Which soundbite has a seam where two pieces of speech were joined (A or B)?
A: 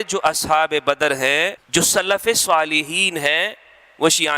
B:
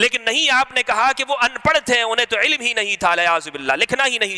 A